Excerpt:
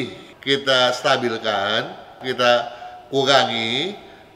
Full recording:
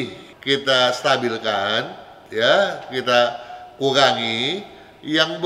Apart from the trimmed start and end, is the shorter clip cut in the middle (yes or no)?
yes